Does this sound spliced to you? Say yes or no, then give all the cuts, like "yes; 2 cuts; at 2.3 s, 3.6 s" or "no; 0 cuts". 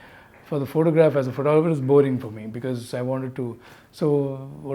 no; 0 cuts